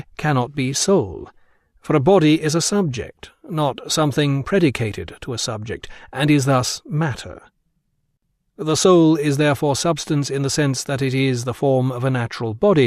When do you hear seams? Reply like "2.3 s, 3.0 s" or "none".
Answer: 10.0 s